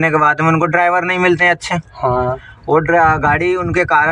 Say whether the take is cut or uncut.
uncut